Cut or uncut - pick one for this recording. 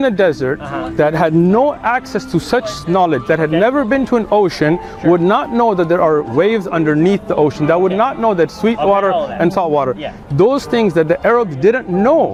uncut